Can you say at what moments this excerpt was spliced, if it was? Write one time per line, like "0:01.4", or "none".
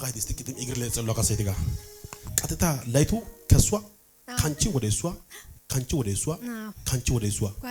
none

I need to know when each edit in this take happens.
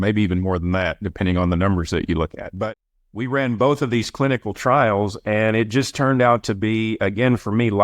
0:02.7

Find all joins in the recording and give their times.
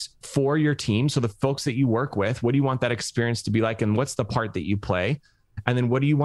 none

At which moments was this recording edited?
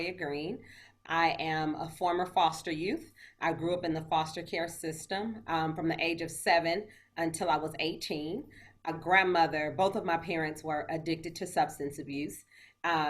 0:00.9
0:08.9

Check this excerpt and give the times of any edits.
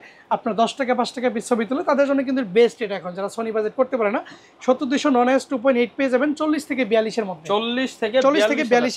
none

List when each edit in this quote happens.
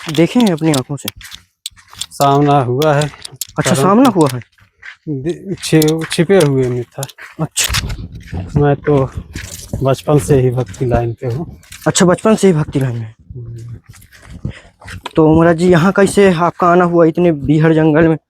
0:07.6

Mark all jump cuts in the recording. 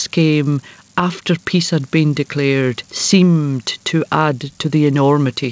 0:02.9
0:04.6

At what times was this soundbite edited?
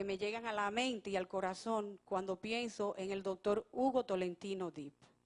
none

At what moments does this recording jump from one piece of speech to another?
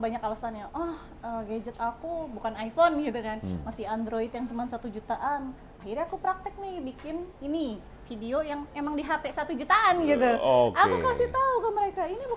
none

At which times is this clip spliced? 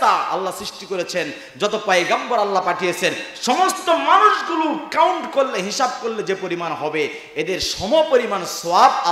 none

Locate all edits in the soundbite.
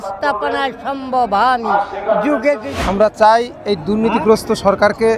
0:02.7

